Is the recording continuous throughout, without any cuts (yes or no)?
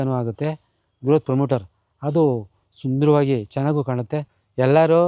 no